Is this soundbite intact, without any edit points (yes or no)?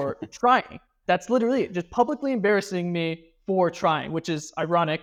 yes